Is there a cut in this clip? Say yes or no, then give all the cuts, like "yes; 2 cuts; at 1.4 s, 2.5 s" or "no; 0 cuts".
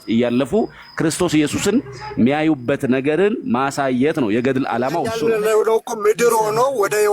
yes; 1 cut; at 5.1 s